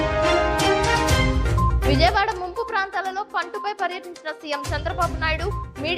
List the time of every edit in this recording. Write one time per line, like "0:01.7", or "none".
0:01.8